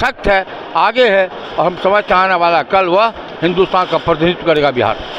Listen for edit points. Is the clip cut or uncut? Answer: uncut